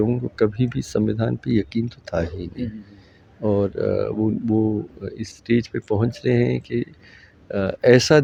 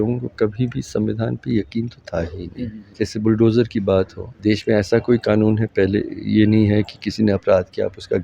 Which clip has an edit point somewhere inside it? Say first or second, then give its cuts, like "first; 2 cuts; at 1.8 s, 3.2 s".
second; 2 cuts; at 2.8 s, 4.2 s